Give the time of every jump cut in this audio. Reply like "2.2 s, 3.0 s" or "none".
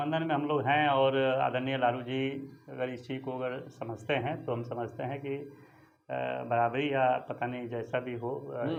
none